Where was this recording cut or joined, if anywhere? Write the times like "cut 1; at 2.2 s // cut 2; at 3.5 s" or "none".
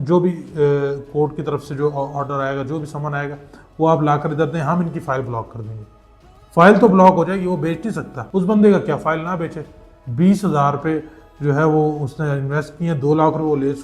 none